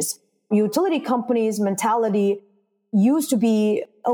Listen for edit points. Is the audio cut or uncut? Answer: uncut